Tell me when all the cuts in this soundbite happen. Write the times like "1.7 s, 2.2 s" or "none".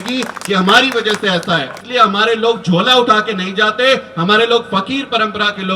1.8 s